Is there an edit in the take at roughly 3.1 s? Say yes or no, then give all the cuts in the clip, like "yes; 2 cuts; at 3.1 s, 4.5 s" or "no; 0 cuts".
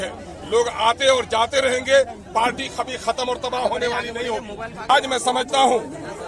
no; 1 cut; at 4.9 s